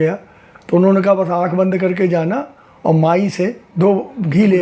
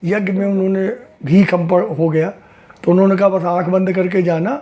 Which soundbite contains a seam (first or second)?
first